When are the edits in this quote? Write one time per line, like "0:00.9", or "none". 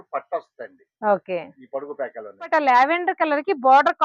0:02.5